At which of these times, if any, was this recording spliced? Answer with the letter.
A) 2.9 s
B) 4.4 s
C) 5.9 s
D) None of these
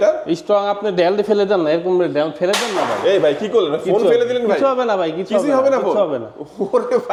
D